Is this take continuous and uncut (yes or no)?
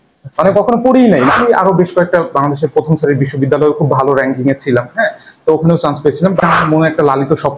no